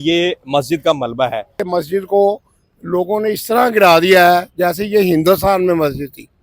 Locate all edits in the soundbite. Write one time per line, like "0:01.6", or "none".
0:01.7